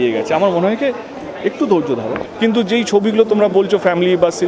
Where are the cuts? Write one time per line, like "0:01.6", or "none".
0:02.2